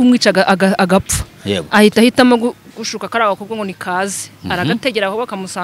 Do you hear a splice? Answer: no; 0 cuts

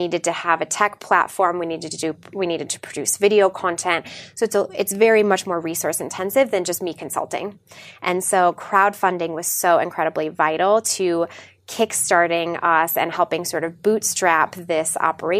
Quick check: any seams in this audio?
no; 0 cuts

